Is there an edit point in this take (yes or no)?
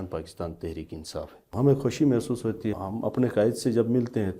yes